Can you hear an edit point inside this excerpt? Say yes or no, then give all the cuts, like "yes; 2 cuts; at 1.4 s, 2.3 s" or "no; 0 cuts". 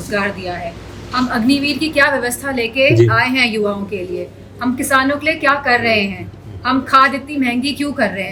no; 0 cuts